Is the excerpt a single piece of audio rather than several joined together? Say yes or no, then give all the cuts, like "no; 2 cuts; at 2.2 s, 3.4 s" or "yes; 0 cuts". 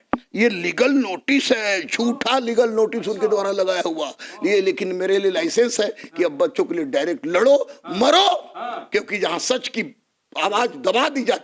yes; 0 cuts